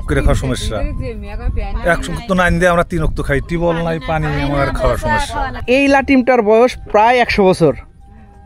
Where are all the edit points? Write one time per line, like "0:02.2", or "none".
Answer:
0:05.6